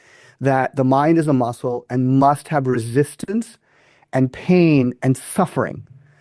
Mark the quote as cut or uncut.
uncut